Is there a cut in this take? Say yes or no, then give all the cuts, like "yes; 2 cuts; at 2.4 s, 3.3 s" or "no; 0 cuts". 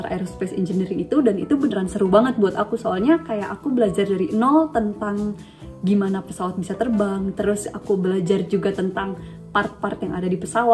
no; 0 cuts